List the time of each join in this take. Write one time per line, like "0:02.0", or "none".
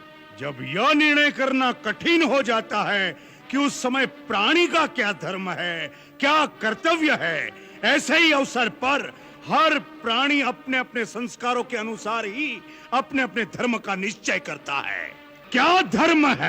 0:15.4